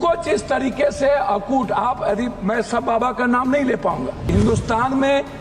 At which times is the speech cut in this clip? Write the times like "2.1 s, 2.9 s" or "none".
4.3 s